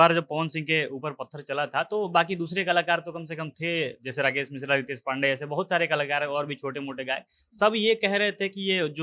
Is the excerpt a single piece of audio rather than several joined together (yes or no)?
yes